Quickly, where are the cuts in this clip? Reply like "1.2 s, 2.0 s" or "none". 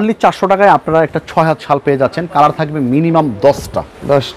none

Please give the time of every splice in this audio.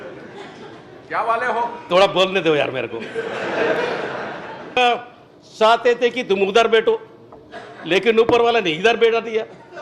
4.8 s

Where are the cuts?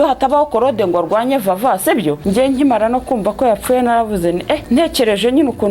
2.2 s, 4.6 s

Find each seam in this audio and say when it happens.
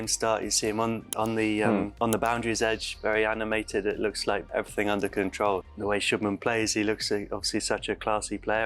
1.9 s, 4.4 s, 5.7 s

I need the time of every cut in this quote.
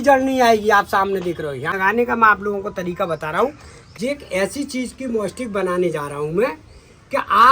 1.8 s, 3.8 s

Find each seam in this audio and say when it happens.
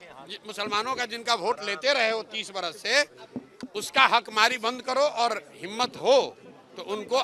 none

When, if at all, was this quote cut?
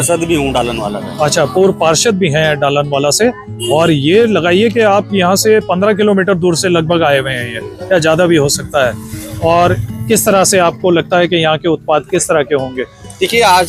none

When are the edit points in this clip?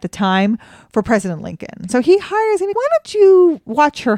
1.8 s, 2.7 s

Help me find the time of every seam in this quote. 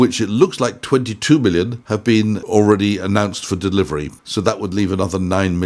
2.1 s, 4.2 s

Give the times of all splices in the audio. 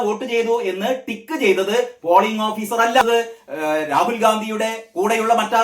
3.0 s

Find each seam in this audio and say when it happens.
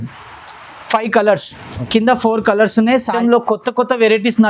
3.2 s

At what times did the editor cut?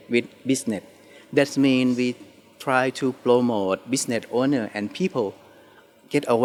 none

